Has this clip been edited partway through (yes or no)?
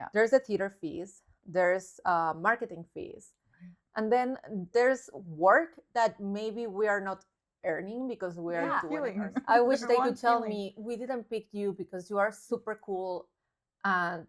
yes